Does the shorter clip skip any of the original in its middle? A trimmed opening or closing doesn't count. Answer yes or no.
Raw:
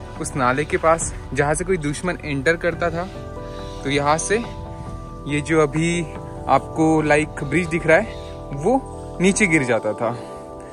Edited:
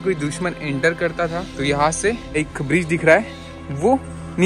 yes